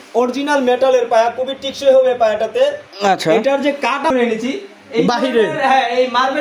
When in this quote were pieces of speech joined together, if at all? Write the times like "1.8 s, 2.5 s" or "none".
4.1 s